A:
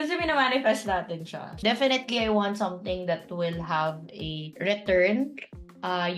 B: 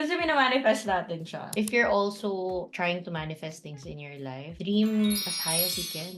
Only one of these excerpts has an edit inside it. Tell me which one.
B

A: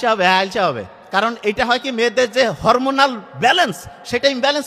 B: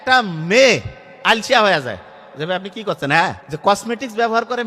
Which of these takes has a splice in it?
B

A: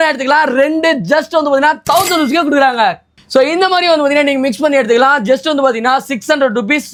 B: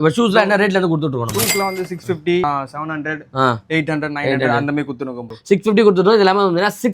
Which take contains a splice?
B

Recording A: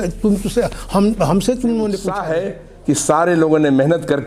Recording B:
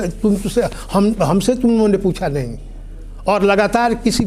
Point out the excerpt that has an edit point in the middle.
A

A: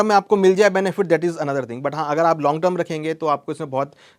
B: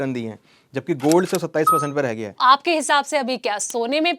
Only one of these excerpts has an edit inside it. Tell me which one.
B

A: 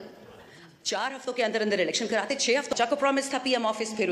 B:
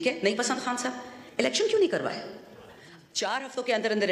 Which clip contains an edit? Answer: A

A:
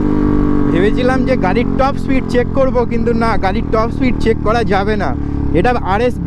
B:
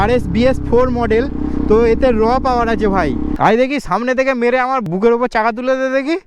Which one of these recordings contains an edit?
B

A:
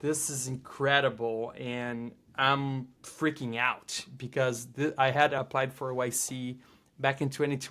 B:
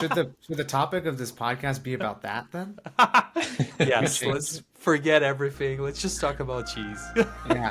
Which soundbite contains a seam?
A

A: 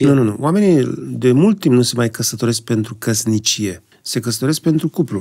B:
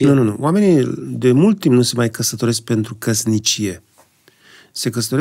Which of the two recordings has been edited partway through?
A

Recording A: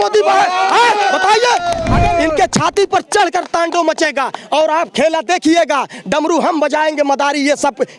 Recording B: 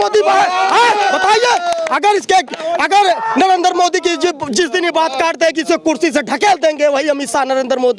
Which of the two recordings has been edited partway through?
A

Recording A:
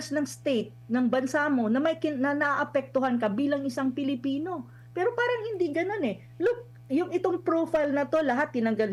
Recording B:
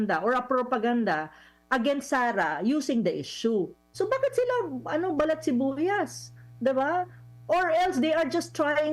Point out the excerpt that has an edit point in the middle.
B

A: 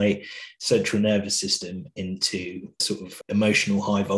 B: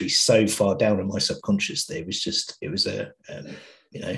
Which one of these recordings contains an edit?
A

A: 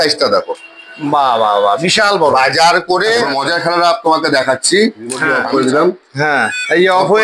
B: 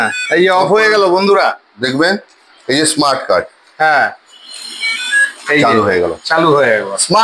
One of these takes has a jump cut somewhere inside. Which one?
A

